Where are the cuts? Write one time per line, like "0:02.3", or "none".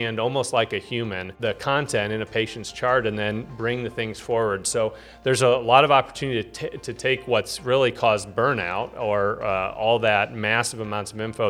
0:01.3

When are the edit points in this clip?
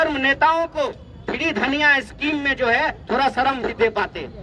none

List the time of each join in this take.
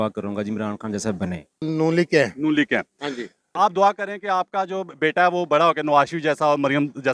0:01.6
0:03.5

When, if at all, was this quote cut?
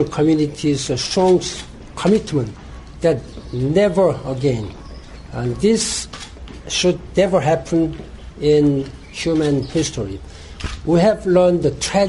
none

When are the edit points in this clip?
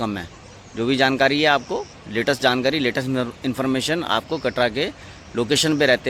none

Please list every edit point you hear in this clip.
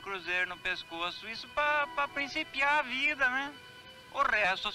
none

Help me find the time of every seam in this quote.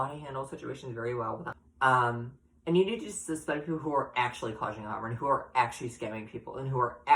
0:01.6

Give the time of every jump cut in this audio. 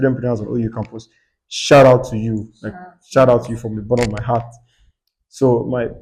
none

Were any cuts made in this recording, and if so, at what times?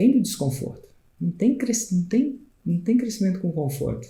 none

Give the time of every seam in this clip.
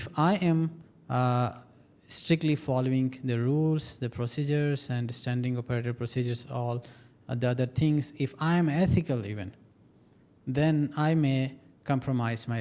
none

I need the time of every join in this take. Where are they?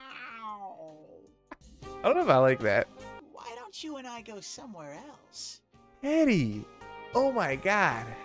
0:03.2

